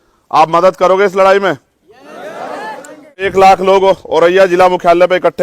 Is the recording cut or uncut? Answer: cut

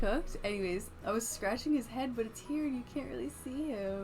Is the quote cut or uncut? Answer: cut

